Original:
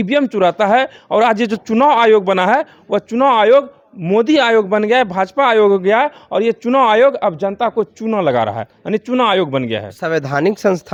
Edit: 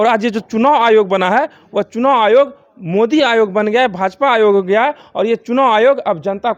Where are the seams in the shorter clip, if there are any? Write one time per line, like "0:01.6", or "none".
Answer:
none